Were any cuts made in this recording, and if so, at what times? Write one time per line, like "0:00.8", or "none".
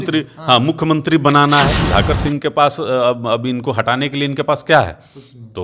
0:01.8